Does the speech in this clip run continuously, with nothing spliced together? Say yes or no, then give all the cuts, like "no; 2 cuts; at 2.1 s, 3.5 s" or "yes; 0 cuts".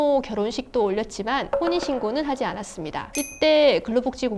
no; 1 cut; at 3.1 s